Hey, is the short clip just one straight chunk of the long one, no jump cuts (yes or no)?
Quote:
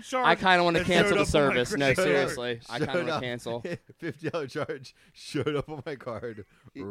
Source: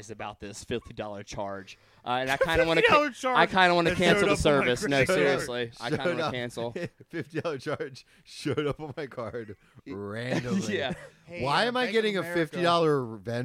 yes